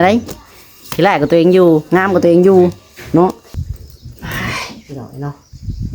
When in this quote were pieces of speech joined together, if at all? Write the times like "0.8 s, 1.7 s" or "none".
3.5 s